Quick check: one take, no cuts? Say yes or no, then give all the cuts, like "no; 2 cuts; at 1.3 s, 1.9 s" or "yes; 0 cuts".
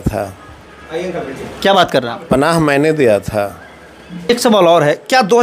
no; 1 cut; at 4.3 s